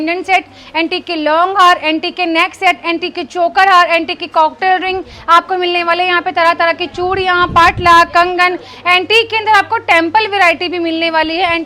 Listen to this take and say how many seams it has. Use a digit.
0